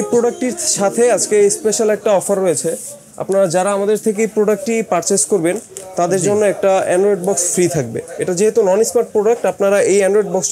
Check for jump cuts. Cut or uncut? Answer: uncut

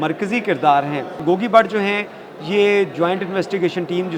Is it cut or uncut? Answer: cut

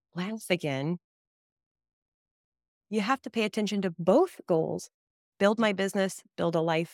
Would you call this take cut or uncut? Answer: uncut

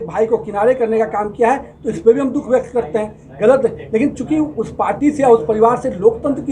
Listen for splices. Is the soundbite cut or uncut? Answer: uncut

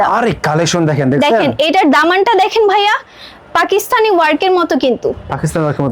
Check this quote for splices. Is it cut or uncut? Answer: uncut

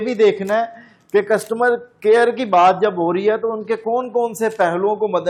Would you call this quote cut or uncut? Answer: uncut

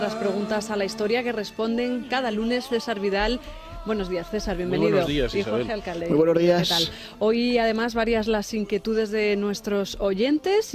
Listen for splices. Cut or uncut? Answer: cut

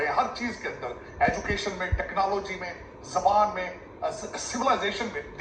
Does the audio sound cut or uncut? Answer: uncut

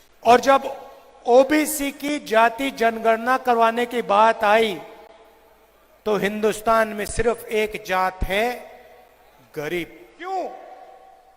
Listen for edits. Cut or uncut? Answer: cut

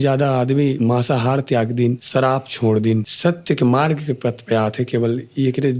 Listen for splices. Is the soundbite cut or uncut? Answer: cut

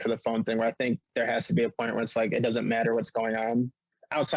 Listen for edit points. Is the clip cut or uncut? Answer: uncut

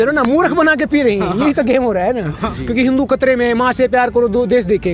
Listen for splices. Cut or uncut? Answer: cut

